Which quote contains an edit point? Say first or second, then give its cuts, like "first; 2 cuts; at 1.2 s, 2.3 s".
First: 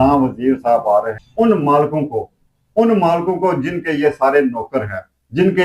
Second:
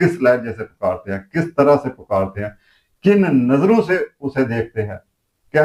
first; 1 cut; at 1.2 s